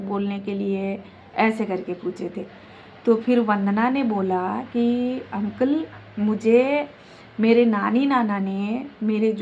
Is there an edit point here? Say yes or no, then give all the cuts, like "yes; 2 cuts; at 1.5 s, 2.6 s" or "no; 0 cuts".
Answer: no; 0 cuts